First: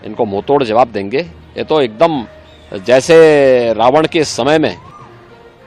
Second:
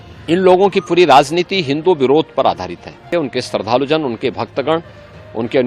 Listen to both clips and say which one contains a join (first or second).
second